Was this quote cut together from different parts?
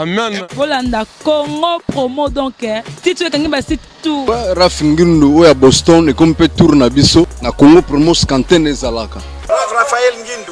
yes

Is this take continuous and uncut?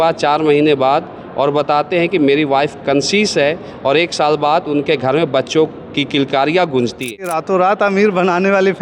no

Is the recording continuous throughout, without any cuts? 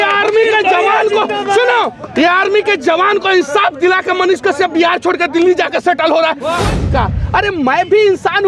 no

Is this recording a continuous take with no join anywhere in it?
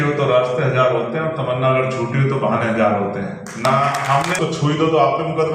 no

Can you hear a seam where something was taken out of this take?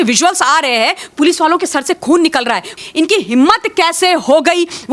yes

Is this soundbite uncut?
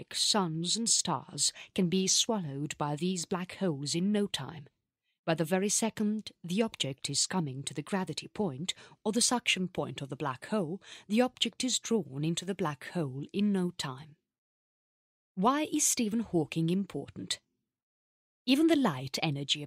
no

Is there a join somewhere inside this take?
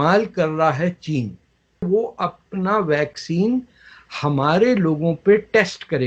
yes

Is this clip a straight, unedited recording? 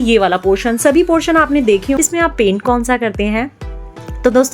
no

